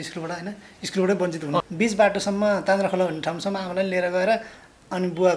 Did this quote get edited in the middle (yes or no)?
yes